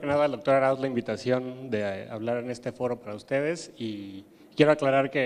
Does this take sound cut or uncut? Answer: cut